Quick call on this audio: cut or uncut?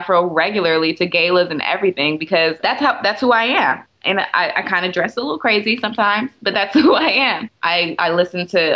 cut